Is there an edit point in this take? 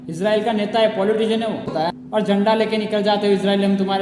yes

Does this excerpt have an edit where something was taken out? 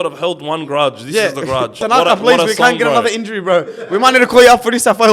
yes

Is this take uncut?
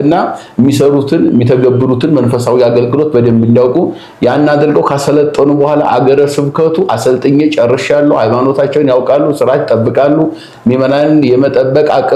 yes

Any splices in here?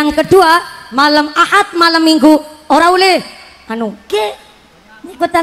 yes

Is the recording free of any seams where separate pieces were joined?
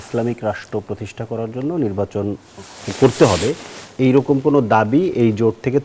yes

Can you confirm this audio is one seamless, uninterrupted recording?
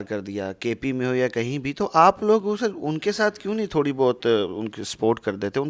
yes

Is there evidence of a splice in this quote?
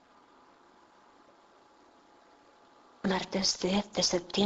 no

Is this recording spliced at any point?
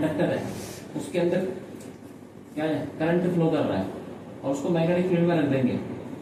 no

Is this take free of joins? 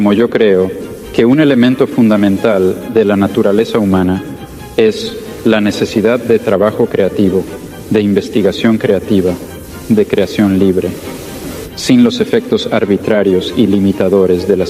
yes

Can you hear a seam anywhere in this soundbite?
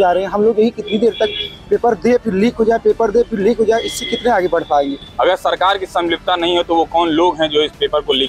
yes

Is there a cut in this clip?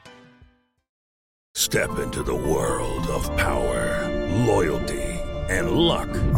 yes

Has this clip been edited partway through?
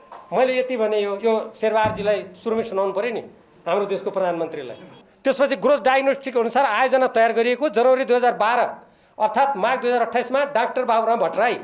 yes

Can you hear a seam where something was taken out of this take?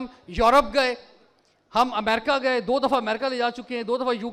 no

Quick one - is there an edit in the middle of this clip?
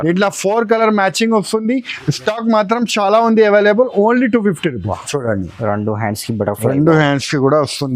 yes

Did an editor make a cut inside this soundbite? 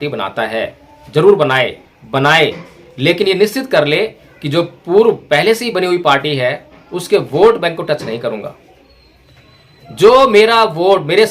yes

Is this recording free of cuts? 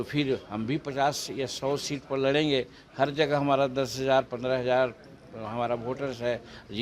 yes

